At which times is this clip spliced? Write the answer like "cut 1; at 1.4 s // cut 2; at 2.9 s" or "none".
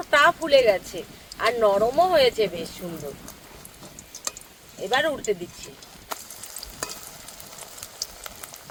none